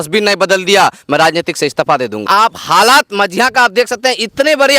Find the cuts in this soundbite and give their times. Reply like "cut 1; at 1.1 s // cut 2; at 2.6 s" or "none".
cut 1; at 2.2 s